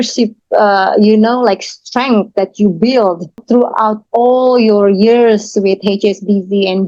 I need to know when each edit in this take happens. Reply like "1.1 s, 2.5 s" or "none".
3.4 s